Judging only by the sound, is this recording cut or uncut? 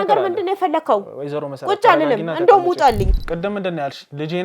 cut